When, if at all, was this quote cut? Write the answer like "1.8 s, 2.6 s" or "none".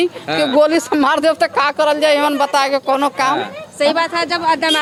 none